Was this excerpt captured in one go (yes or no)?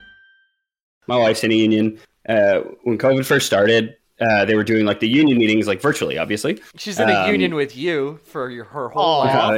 no